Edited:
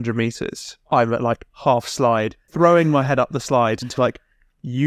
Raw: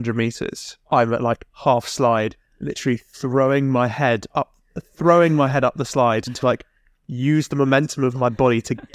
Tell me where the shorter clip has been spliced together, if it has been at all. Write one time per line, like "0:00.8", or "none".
0:02.4